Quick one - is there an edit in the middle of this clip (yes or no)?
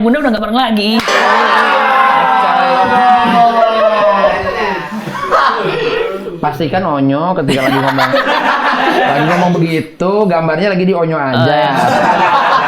no